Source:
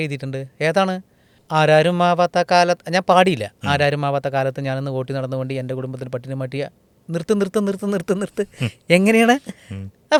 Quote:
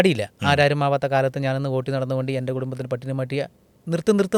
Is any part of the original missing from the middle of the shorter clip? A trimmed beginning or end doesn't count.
no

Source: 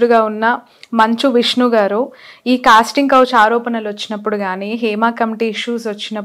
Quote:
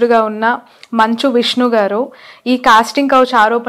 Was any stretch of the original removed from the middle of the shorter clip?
no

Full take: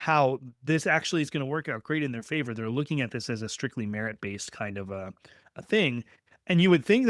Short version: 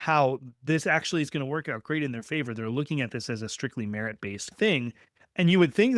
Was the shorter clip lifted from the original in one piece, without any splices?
no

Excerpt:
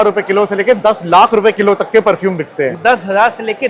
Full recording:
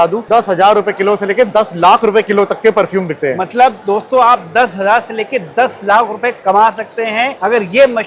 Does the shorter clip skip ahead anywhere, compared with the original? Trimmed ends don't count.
yes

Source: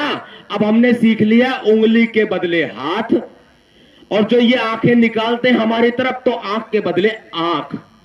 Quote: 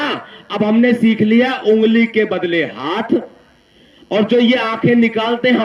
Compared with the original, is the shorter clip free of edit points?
yes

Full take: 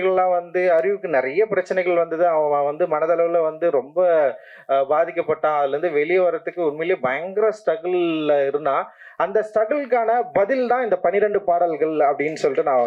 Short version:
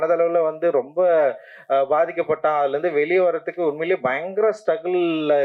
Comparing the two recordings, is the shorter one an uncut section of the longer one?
yes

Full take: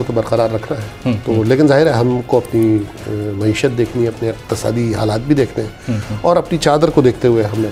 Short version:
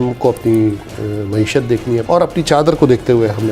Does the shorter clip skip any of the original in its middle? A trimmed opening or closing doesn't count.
yes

